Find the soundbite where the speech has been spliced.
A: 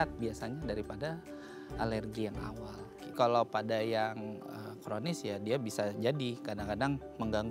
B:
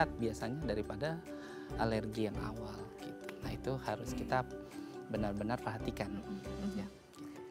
A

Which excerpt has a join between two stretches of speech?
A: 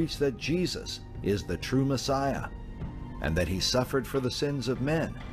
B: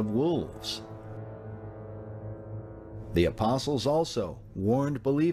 B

